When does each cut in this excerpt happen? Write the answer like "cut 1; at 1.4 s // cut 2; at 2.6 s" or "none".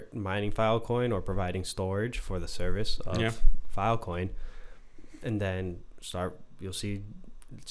none